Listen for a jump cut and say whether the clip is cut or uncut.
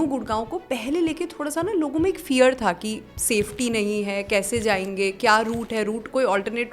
uncut